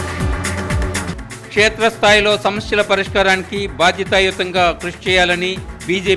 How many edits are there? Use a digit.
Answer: 1